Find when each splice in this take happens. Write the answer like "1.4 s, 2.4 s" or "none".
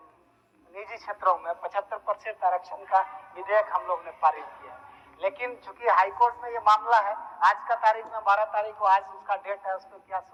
none